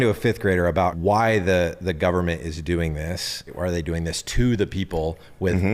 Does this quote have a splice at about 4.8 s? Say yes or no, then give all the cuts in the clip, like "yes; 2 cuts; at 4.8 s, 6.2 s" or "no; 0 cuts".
no; 2 cuts; at 1.0 s, 3.5 s